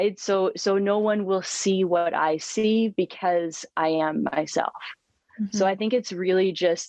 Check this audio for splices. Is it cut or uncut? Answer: uncut